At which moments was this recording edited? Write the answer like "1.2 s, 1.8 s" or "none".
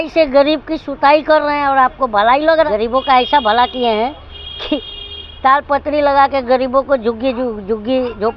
2.5 s